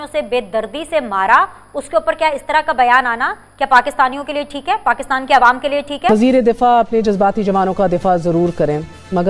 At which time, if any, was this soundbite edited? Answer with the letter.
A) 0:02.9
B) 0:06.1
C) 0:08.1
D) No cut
B